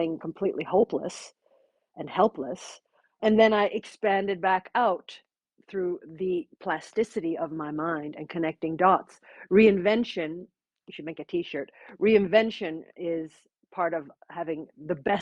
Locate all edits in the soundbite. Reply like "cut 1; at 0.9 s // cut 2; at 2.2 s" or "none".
cut 1; at 3.2 s // cut 2; at 14.2 s